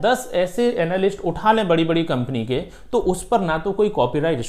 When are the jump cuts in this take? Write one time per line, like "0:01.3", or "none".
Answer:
none